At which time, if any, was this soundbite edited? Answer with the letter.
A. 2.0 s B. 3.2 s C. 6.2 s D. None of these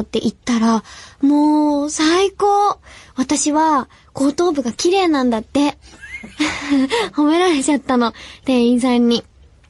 A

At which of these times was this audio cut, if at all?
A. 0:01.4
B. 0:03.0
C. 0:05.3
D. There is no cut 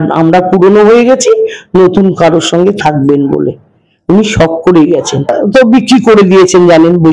C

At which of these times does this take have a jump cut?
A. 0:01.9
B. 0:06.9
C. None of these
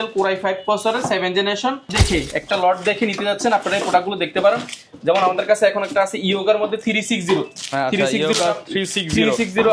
A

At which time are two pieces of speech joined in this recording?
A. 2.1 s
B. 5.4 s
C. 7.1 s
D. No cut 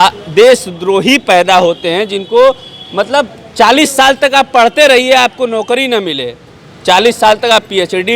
D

